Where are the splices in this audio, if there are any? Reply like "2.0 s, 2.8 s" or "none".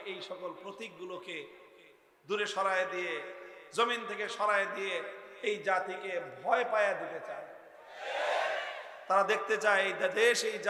none